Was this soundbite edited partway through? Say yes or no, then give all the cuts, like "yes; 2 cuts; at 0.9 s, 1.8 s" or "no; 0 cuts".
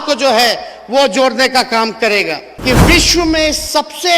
yes; 1 cut; at 2.5 s